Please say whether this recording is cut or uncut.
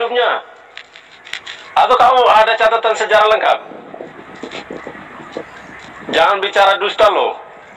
uncut